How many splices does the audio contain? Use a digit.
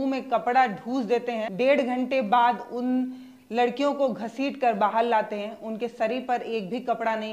1